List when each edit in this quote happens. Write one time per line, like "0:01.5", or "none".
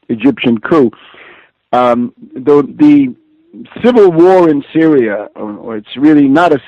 0:02.1